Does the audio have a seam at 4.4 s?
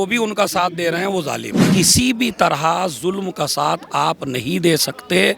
no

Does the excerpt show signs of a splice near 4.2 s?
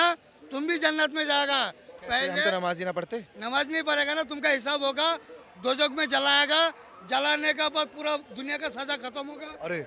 no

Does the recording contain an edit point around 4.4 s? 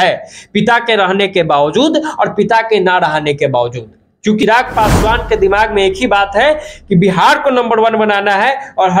yes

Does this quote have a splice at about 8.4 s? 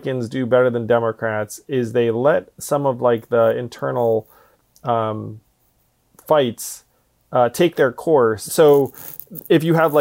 yes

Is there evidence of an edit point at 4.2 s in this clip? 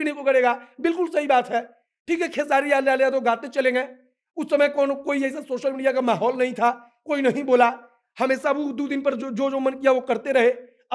no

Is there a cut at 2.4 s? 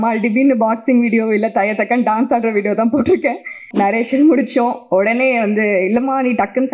no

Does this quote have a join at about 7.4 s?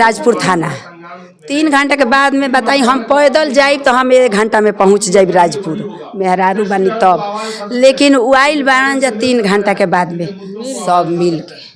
no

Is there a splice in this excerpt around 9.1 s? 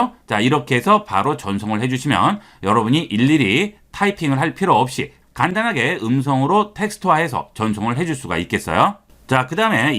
yes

